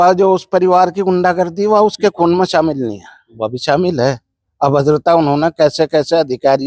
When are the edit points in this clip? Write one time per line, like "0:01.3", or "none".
none